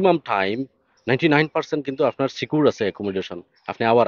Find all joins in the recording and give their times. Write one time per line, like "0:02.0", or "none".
none